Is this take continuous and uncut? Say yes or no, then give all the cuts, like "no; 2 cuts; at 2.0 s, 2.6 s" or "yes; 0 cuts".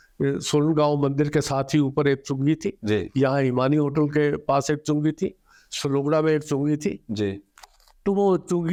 yes; 0 cuts